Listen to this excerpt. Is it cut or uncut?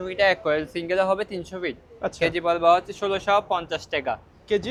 uncut